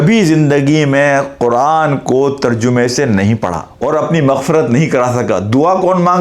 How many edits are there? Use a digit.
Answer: 1